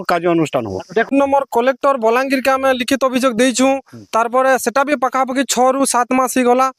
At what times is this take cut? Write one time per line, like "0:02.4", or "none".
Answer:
0:01.1